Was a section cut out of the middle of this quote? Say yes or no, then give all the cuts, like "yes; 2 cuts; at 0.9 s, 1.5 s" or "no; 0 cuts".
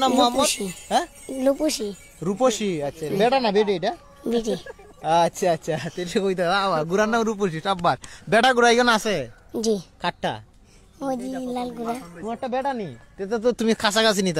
no; 0 cuts